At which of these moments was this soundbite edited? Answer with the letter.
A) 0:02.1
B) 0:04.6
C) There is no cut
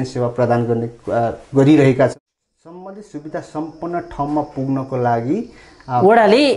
A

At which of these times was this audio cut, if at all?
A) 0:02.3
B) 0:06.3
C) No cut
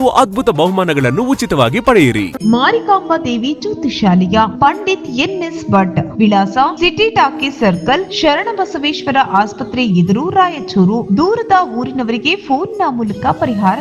A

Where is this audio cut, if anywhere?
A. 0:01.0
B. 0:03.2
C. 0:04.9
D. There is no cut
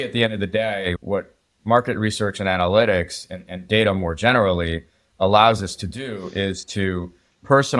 A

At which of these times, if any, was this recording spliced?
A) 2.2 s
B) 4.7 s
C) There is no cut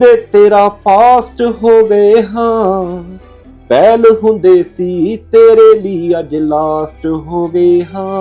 C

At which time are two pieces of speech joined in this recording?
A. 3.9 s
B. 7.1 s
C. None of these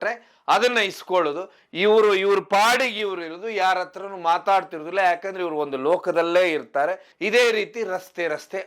B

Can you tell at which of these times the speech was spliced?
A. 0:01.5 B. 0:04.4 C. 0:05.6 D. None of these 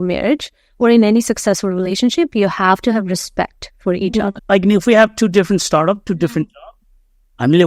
B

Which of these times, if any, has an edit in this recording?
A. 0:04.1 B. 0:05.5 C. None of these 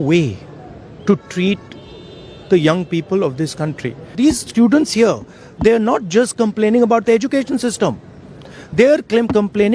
A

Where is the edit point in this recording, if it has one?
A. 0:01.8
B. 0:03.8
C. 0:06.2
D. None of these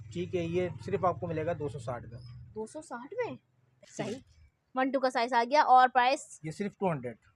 B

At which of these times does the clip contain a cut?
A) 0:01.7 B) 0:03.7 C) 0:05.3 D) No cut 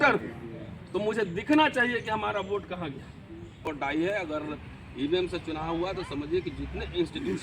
B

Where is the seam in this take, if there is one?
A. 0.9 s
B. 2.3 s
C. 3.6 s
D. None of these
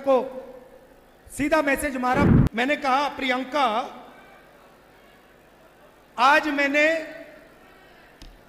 B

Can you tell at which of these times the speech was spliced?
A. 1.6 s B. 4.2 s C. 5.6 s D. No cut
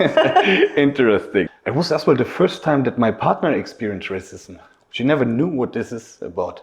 A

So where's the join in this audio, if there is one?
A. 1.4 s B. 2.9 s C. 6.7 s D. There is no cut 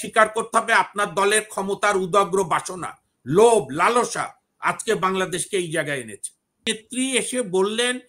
C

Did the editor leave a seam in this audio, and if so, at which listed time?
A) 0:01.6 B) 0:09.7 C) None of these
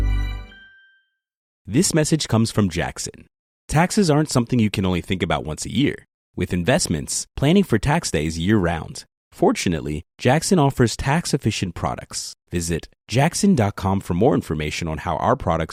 C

